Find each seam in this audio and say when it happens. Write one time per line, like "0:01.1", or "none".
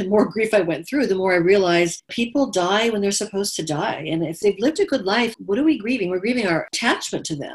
0:02.2
0:04.4
0:05.4
0:06.7